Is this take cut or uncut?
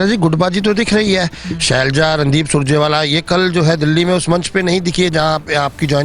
uncut